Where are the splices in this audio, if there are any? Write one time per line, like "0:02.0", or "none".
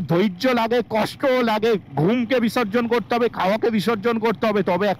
none